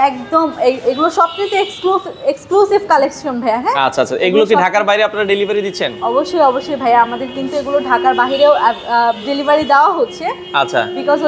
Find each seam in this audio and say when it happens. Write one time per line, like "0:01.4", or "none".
none